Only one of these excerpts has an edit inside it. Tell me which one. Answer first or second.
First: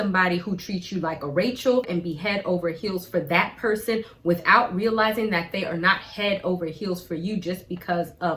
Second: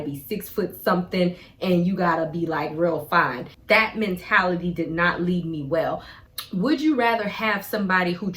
second